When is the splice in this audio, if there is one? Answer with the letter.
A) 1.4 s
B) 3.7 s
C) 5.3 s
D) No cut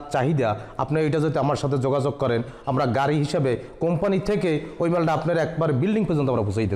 D